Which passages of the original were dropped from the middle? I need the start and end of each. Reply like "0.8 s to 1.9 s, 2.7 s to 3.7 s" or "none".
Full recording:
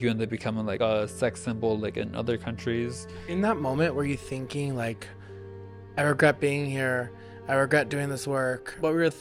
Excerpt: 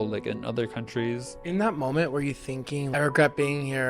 3.0 s to 3.2 s, 4.7 s to 5.9 s